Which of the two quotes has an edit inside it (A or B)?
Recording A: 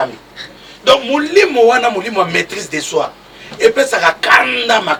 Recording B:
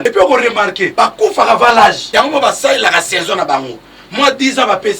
B